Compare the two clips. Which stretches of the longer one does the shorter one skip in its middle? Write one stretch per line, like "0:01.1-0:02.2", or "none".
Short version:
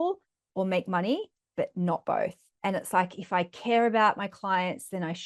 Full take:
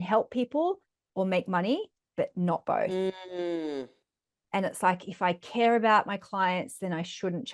0:02.9-0:04.2